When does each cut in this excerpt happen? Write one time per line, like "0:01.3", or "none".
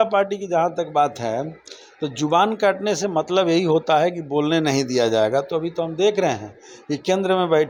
none

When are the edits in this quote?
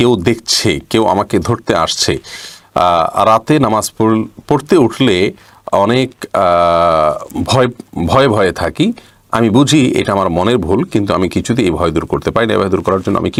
none

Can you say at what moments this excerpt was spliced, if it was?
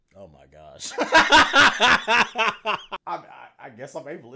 0:03.0

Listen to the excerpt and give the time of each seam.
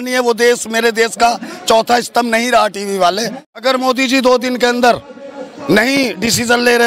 0:03.6

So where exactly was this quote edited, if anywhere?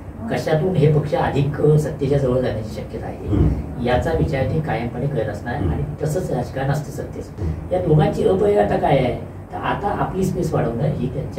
0:07.3

